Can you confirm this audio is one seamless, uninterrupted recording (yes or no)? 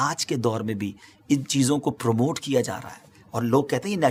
yes